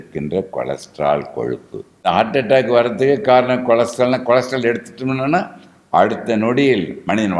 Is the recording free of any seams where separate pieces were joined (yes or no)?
no